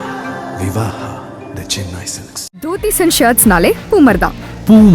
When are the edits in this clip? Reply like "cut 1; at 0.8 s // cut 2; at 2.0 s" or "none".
cut 1; at 2.7 s